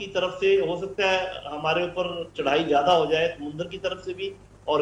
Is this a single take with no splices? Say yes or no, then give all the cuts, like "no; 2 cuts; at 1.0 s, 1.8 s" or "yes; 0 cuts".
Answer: yes; 0 cuts